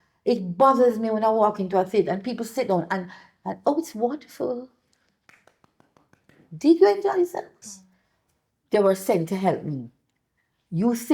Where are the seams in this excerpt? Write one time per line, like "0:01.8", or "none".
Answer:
0:07.6